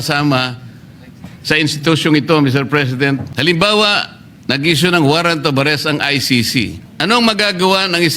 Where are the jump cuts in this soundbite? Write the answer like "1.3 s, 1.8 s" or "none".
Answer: 3.3 s, 6.8 s